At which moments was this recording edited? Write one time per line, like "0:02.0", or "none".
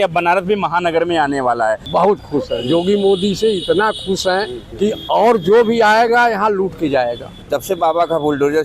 0:01.8
0:04.6
0:07.3